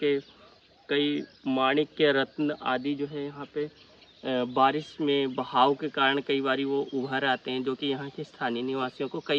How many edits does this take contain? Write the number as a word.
zero